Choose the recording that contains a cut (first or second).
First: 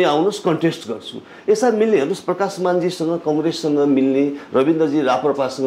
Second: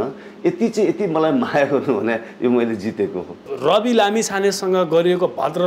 second